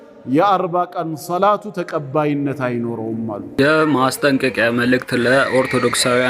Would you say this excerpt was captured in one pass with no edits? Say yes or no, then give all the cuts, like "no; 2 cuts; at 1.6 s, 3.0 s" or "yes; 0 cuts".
no; 1 cut; at 3.5 s